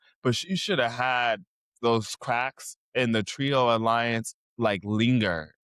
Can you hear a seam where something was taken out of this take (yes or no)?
no